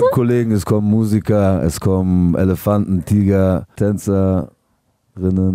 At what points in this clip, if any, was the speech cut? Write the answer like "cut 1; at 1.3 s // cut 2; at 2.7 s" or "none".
cut 1; at 3.7 s

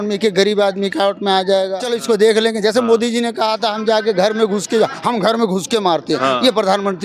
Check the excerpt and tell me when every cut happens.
cut 1; at 1.8 s

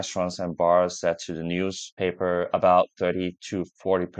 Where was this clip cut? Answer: none

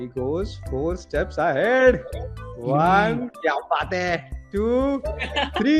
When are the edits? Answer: none

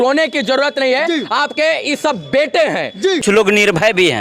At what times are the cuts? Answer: cut 1; at 3.2 s

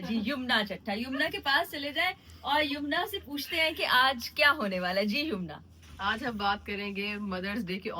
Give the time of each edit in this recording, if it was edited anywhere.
none

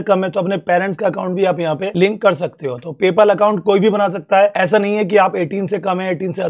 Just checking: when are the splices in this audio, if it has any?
cut 1; at 1.9 s // cut 2; at 4.5 s

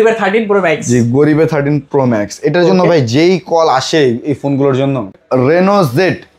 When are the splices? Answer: cut 1; at 5.1 s

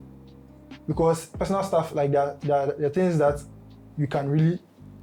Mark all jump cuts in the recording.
none

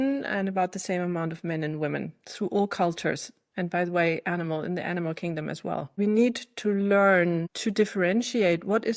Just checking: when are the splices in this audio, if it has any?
cut 1; at 6.0 s // cut 2; at 7.5 s

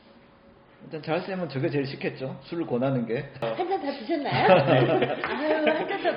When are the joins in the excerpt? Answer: cut 1; at 3.4 s

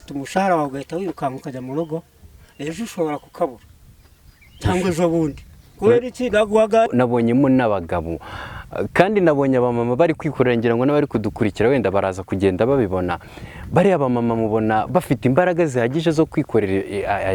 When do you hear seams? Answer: cut 1; at 6.9 s

